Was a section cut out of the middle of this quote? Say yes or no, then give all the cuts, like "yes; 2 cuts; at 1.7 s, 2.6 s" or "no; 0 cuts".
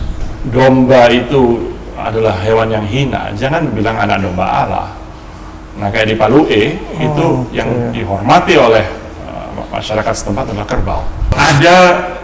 yes; 1 cut; at 11.3 s